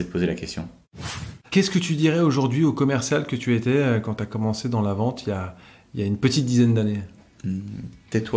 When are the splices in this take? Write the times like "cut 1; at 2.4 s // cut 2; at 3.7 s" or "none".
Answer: cut 1; at 1.1 s